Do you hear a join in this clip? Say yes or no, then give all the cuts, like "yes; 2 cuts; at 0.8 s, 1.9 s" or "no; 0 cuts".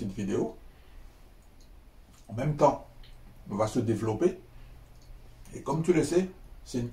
no; 0 cuts